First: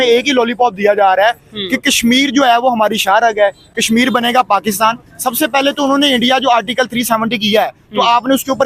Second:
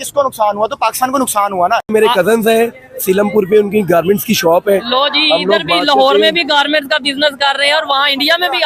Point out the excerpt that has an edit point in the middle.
second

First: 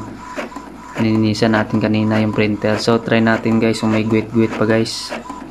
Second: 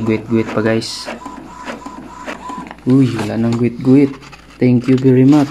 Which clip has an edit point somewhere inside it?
second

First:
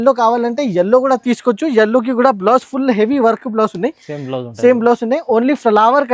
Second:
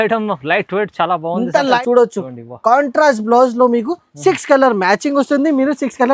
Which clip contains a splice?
second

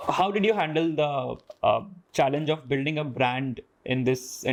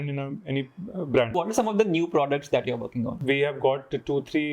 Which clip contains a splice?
second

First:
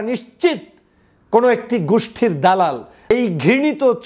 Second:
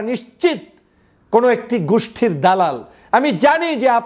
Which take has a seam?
first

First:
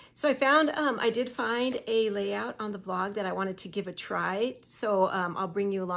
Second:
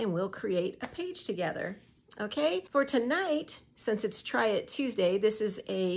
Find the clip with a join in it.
second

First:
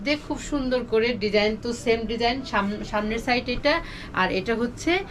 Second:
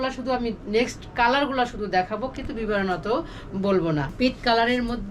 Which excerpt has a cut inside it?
second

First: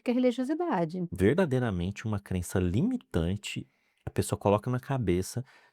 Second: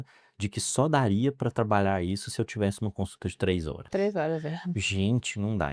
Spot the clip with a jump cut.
first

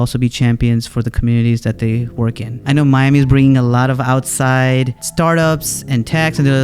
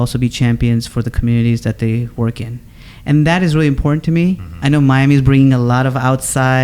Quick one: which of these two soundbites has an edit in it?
first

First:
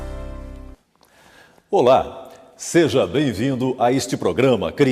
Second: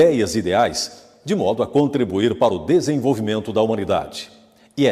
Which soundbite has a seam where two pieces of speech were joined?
first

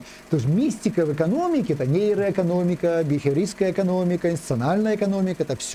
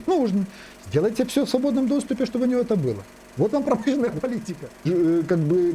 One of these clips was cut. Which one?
second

